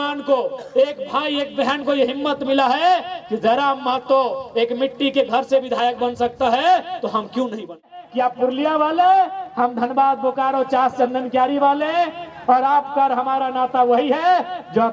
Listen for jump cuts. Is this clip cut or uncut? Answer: cut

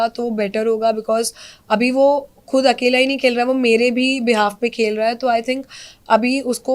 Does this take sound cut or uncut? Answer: uncut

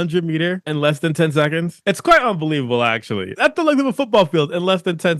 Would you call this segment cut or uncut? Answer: cut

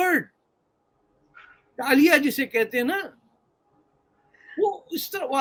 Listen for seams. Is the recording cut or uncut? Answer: uncut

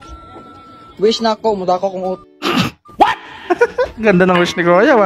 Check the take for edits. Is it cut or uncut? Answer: uncut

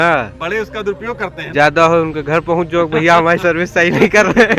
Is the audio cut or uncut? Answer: cut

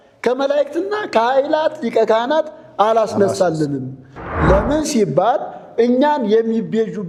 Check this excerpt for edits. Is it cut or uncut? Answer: uncut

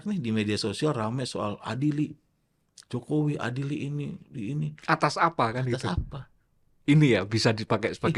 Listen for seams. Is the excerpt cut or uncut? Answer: uncut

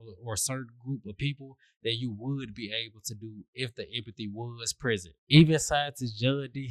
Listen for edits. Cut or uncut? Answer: uncut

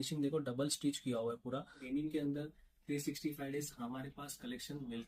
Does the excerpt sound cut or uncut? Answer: cut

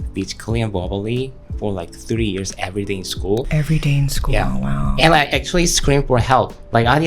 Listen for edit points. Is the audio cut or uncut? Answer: uncut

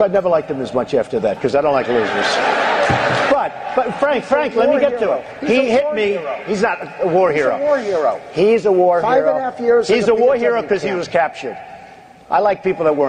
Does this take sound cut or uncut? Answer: cut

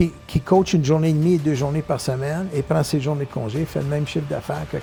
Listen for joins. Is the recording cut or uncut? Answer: uncut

